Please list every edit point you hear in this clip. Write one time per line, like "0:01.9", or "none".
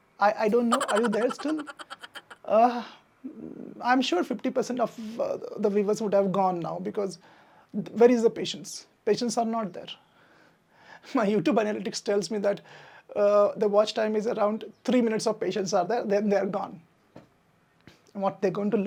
none